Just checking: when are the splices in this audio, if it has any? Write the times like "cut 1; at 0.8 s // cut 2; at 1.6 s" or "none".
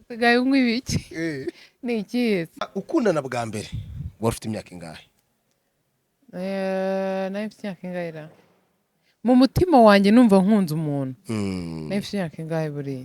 cut 1; at 2.7 s